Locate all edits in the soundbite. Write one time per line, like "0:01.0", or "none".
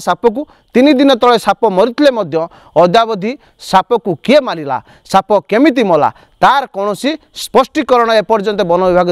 none